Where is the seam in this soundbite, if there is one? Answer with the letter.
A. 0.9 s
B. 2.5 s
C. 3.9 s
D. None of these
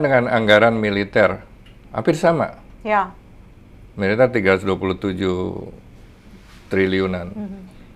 D